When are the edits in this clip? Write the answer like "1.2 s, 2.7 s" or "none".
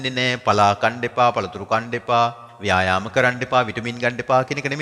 2.5 s